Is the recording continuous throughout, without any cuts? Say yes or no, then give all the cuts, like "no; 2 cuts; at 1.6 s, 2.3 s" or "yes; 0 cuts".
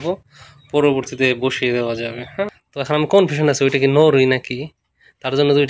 no; 1 cut; at 2.7 s